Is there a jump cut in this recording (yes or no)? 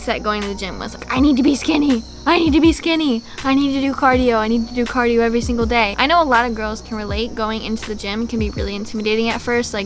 no